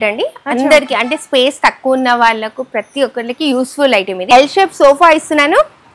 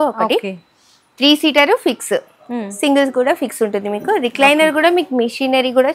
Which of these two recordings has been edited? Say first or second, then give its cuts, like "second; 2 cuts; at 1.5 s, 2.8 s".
first; 1 cut; at 4.2 s